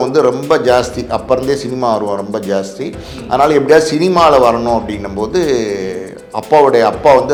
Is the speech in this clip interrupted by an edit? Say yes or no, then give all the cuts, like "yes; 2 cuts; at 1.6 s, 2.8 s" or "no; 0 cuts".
no; 0 cuts